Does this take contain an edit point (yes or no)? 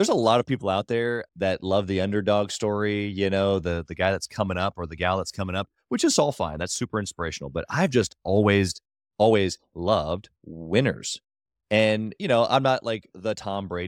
no